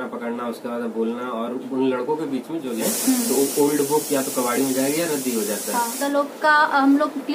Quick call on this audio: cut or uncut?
cut